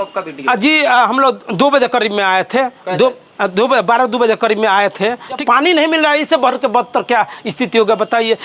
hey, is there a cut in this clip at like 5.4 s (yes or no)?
yes